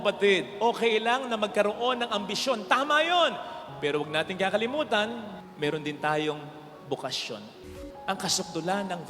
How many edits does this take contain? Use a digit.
1